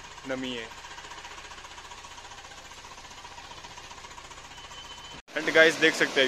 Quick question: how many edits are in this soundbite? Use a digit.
1